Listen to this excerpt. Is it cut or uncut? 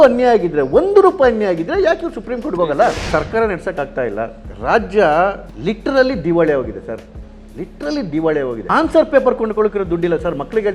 cut